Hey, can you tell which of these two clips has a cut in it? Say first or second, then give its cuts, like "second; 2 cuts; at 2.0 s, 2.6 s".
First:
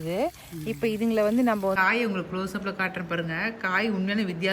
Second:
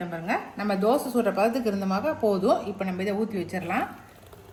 first; 1 cut; at 1.8 s